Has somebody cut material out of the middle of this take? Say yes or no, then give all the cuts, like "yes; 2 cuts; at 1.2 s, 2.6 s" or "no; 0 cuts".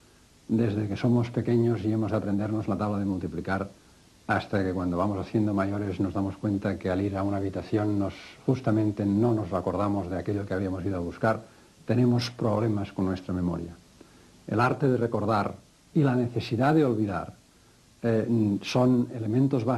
no; 0 cuts